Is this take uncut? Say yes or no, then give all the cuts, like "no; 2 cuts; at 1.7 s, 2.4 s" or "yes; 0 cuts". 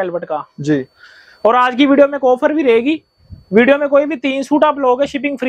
yes; 0 cuts